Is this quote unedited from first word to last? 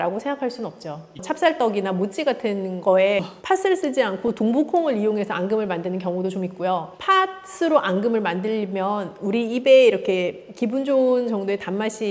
no; 2 cuts; at 1.2 s, 3.3 s

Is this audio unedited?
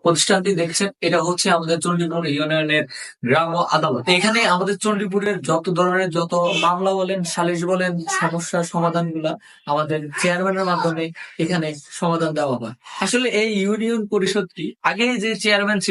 yes; 0 cuts

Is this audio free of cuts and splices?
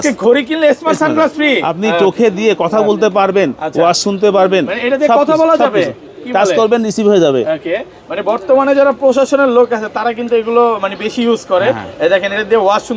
yes; 0 cuts

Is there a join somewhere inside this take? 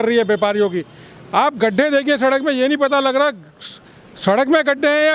no; 0 cuts

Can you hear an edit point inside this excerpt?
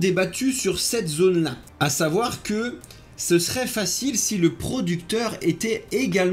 no; 0 cuts

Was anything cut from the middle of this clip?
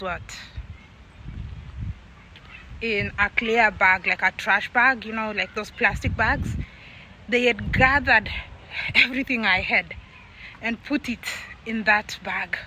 no; 0 cuts

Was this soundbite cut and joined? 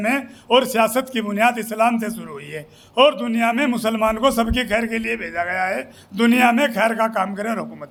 no; 0 cuts

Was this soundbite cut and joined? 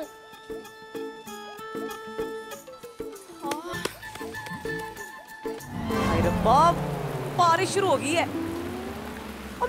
yes; 1 cut; at 5.9 s

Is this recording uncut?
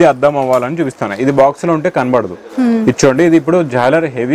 yes; 0 cuts

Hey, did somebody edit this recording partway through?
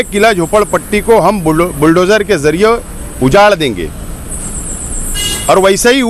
no; 0 cuts

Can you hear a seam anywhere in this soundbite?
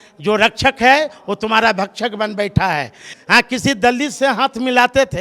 yes; 1 cut; at 3.0 s

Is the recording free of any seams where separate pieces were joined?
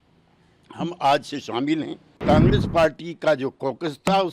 no; 1 cut; at 2.2 s

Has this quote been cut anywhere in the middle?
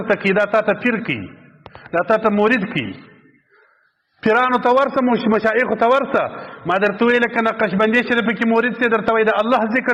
no; 0 cuts

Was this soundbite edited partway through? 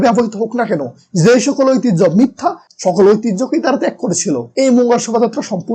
yes; 1 cut; at 4.6 s

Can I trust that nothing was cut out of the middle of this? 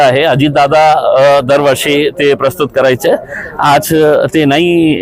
yes; 0 cuts

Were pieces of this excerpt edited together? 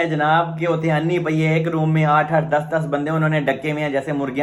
no; 0 cuts

